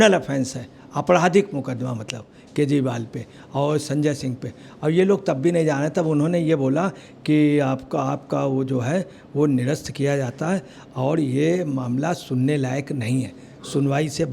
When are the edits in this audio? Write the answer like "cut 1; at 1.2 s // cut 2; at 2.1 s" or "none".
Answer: none